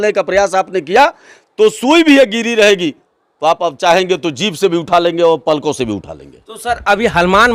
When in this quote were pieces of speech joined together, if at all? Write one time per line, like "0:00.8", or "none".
none